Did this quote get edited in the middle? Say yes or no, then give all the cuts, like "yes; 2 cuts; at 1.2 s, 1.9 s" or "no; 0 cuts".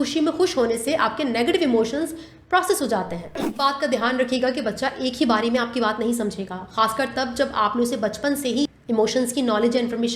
yes; 2 cuts; at 3.5 s, 8.7 s